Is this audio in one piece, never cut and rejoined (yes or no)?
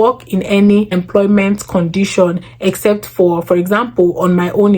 no